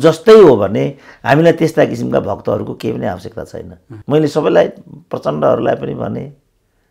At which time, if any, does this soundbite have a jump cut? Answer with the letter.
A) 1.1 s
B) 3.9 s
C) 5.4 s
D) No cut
B